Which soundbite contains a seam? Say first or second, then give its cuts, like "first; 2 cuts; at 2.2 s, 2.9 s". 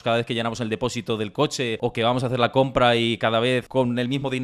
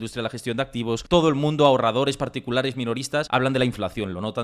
second; 1 cut; at 1.0 s